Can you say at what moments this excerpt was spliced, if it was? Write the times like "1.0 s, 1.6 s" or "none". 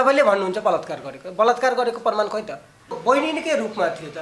3.0 s